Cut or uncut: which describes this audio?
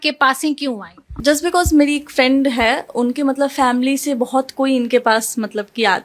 uncut